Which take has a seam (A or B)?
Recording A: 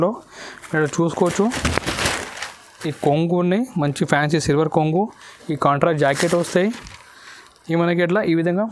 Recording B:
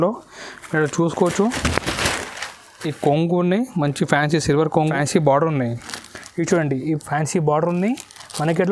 B